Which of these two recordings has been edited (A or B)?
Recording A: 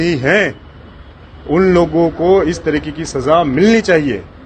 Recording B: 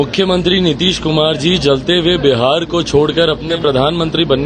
B